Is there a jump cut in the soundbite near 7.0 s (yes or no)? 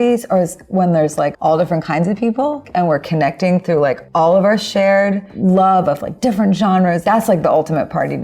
yes